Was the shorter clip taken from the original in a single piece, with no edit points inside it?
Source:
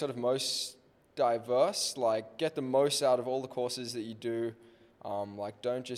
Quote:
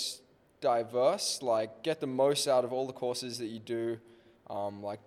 yes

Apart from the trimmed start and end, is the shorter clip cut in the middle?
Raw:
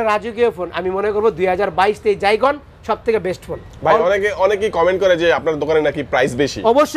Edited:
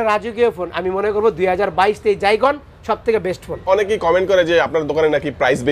yes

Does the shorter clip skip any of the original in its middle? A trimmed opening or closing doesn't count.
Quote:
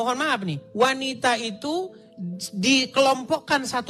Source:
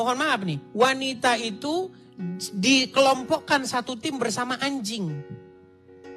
no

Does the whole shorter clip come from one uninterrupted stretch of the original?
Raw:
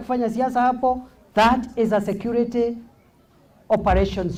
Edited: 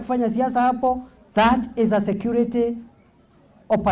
yes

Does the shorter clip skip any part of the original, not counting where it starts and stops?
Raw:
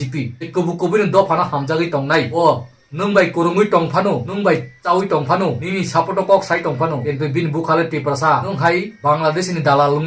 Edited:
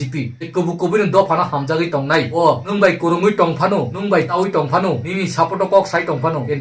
yes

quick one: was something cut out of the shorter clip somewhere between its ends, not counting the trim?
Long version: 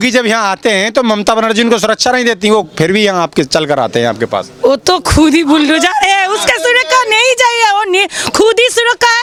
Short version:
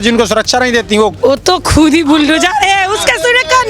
yes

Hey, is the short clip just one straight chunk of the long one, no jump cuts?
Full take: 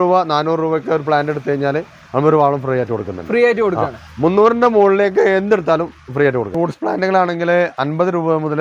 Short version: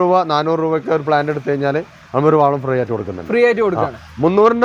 yes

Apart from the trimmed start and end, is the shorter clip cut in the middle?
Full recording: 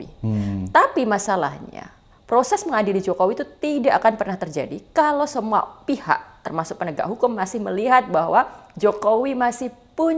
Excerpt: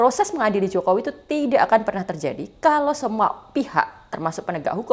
no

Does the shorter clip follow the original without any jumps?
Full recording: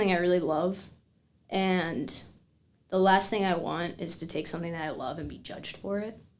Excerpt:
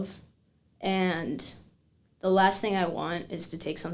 yes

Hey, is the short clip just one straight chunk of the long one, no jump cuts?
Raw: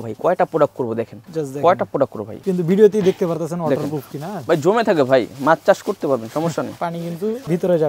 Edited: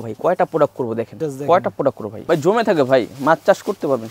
no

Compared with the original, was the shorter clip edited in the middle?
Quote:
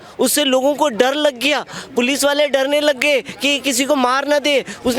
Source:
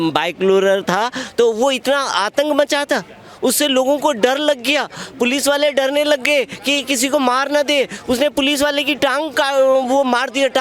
no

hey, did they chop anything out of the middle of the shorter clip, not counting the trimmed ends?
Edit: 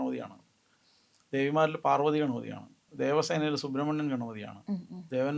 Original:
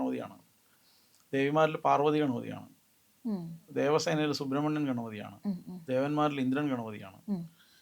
yes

